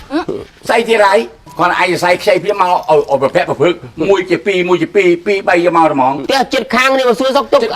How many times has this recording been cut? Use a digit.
1